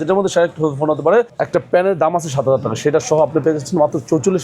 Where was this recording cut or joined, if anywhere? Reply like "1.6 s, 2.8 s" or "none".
1.4 s